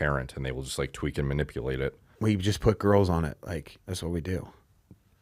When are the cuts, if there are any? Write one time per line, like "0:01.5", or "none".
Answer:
0:02.1